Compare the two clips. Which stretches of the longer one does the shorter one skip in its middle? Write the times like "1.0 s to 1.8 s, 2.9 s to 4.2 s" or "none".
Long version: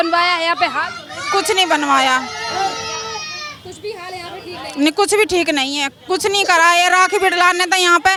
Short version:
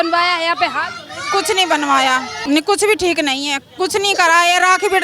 2.3 s to 4.6 s